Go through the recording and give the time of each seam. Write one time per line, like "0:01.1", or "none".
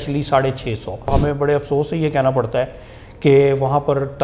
0:01.1

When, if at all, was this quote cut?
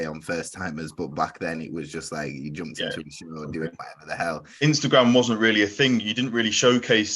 0:04.5

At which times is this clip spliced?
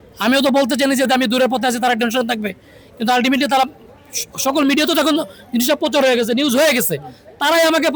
none

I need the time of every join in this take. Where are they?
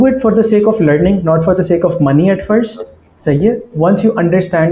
none

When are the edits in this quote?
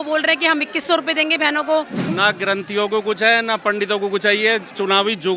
0:02.0

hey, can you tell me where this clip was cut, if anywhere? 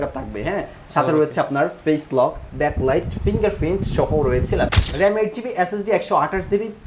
0:04.8

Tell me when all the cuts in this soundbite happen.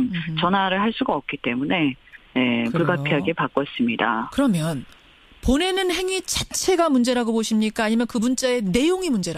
0:06.5

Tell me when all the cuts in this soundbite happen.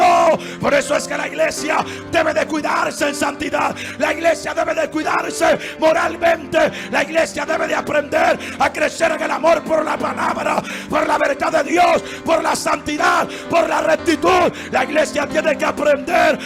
none

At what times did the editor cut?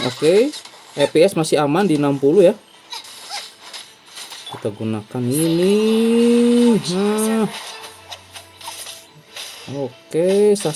none

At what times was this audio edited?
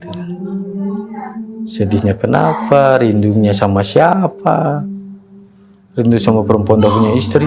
none

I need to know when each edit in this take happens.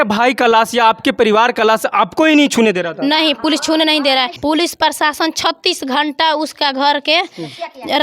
0:04.3

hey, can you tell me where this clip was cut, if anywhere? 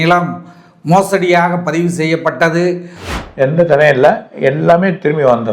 0:03.0

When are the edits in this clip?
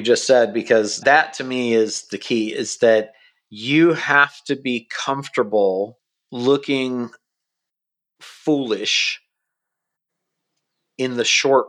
0:01.0

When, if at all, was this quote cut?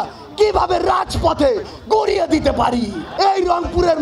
0:03.0

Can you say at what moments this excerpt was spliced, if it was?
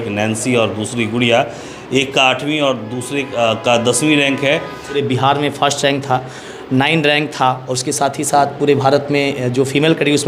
0:04.9

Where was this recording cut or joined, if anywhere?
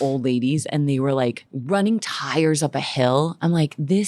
0:01.5

